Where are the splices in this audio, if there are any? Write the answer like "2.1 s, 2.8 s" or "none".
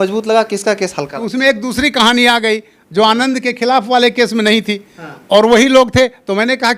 1.1 s